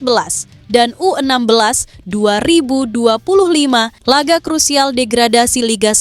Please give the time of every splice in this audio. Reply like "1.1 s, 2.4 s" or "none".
3.9 s